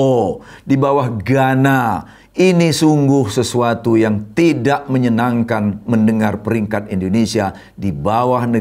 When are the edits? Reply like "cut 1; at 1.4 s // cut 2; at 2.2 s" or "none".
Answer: none